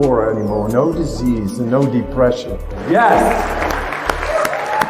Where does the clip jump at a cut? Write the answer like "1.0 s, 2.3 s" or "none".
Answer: 2.8 s